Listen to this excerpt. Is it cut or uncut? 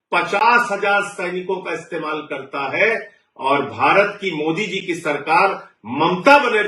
uncut